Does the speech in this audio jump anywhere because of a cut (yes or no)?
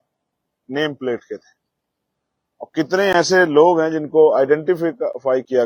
no